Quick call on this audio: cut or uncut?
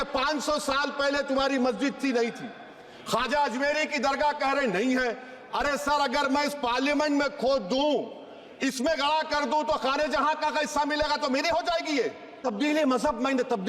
cut